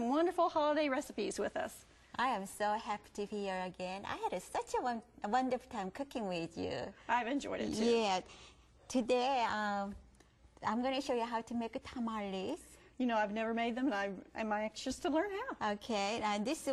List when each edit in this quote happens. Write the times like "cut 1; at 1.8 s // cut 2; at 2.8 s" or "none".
none